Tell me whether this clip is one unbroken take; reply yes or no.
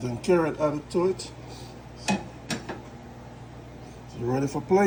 yes